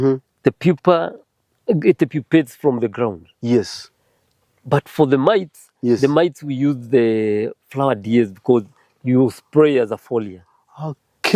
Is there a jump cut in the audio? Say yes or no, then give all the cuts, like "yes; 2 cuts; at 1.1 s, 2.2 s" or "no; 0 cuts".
no; 0 cuts